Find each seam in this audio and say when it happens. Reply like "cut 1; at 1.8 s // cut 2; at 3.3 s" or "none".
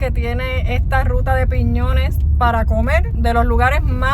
cut 1; at 3.1 s